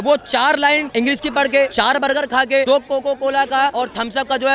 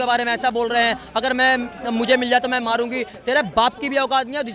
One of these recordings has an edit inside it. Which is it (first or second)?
first